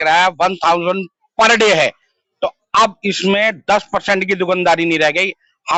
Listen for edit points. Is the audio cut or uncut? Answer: uncut